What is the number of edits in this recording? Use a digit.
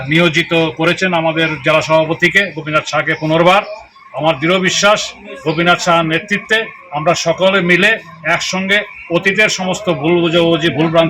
1